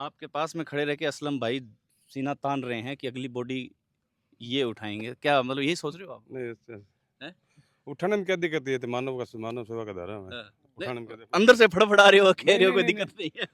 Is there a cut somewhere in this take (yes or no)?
no